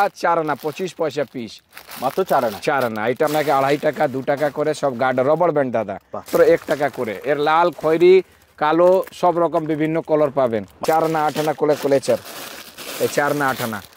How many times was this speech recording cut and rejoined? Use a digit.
3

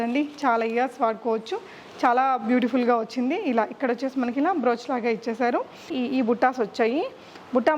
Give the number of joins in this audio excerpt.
1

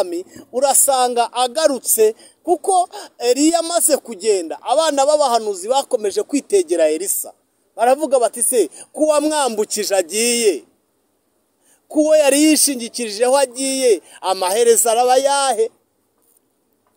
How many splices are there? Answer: 0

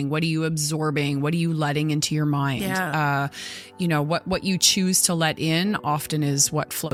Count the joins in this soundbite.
0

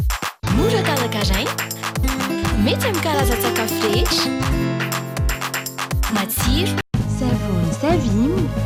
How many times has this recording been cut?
0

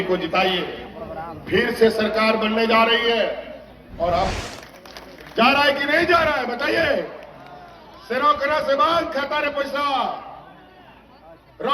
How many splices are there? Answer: 1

